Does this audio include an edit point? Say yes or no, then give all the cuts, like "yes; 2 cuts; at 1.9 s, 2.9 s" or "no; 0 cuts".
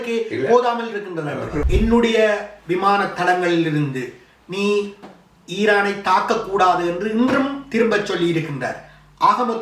yes; 1 cut; at 1.6 s